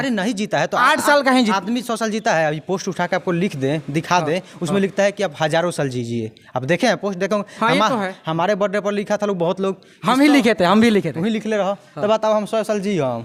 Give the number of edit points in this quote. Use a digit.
0